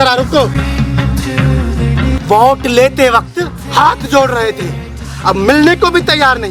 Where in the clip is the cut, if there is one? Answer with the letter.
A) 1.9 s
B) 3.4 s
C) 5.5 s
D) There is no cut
D